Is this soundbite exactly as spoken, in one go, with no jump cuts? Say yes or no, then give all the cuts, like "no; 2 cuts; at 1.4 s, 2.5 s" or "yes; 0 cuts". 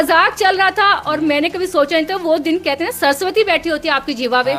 yes; 0 cuts